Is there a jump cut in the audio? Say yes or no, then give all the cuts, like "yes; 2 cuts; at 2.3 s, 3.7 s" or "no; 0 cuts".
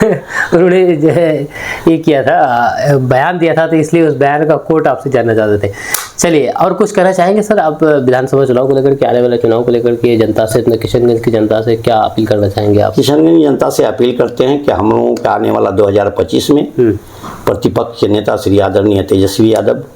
no; 0 cuts